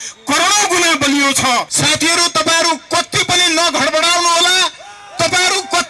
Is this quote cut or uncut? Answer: cut